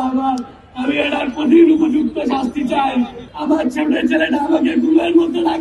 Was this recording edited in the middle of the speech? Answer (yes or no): yes